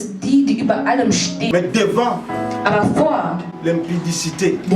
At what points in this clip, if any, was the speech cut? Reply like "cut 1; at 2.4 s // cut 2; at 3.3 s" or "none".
cut 1; at 1.5 s